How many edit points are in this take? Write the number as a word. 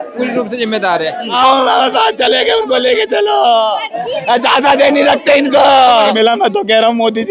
two